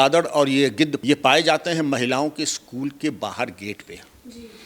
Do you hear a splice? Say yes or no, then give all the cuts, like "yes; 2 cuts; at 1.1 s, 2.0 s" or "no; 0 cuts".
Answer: yes; 1 cut; at 1.0 s